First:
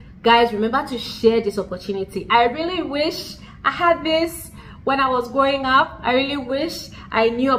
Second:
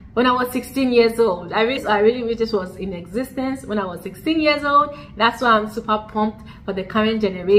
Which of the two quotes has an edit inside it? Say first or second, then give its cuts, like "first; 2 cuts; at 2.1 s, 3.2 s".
second; 1 cut; at 1.8 s